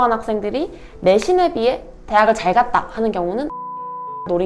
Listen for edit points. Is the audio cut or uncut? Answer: uncut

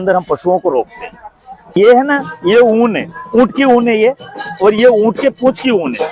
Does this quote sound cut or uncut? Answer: cut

